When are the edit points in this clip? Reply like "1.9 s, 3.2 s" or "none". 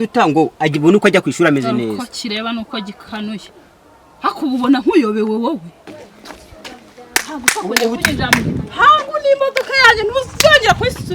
6.1 s